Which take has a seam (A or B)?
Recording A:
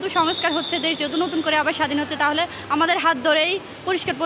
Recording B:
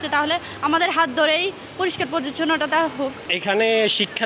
B